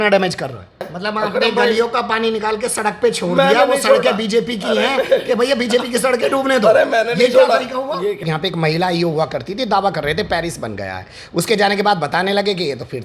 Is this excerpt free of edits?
no; 2 cuts; at 0.9 s, 8.2 s

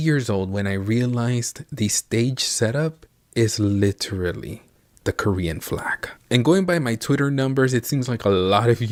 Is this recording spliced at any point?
no; 0 cuts

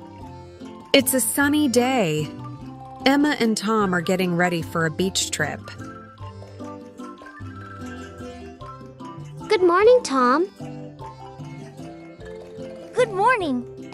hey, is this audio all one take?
no; 1 cut; at 0.9 s

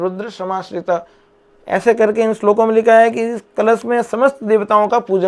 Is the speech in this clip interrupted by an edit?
no; 0 cuts

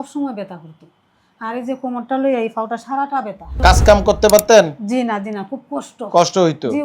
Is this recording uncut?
no; 1 cut; at 3.5 s

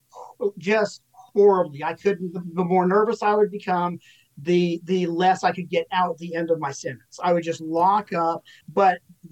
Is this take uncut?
yes; 0 cuts

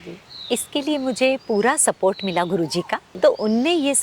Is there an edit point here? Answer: yes; 1 cut; at 3.1 s

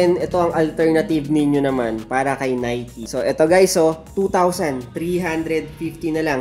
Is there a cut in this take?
no; 0 cuts

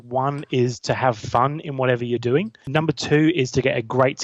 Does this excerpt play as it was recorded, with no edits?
no; 1 cut; at 2.6 s

